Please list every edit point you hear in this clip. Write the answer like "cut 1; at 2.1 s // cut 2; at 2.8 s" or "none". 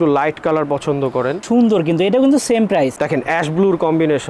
cut 1; at 1.4 s // cut 2; at 3.0 s